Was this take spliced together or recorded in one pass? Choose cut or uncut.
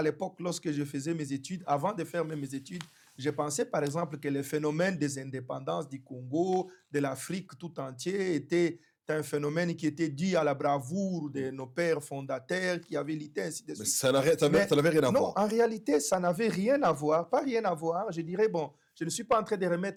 uncut